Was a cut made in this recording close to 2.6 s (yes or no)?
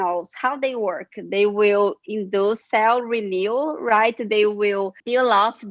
yes